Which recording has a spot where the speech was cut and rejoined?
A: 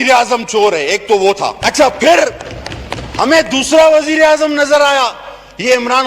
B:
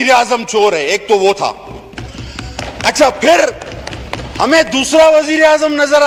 A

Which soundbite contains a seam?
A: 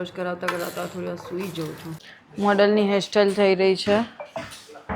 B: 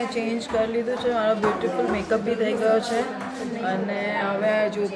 A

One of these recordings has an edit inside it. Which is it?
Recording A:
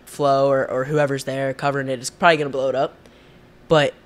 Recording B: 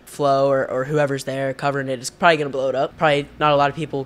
B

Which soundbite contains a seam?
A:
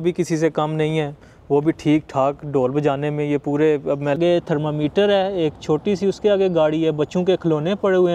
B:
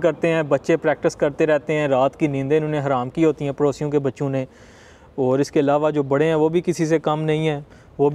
A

